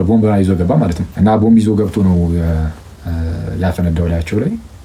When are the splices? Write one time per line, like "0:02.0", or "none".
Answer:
0:01.0